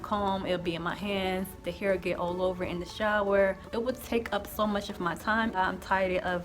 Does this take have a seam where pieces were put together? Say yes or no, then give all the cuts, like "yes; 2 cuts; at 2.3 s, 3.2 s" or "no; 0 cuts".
yes; 2 cuts; at 3.6 s, 5.6 s